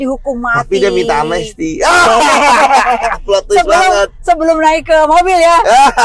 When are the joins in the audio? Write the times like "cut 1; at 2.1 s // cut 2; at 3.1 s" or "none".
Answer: none